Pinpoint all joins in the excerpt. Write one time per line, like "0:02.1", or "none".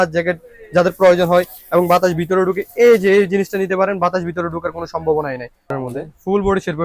0:05.7